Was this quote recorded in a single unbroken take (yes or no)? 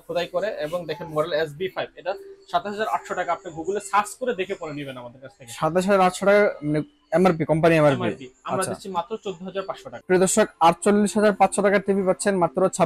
no